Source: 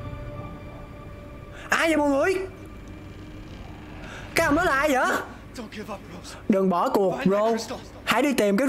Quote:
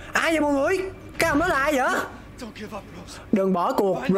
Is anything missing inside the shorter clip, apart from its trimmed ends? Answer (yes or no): yes